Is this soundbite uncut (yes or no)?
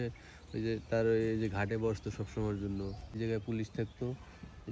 no